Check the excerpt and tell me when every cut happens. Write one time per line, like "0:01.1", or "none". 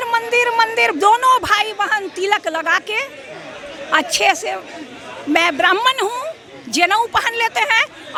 none